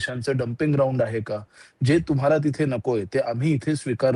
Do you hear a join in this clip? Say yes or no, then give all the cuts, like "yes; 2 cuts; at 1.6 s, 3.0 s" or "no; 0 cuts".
no; 0 cuts